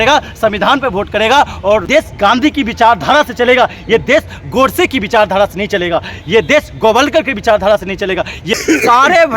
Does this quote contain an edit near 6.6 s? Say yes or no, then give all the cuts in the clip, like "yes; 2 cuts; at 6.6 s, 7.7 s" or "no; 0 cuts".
no; 2 cuts; at 1.9 s, 8.6 s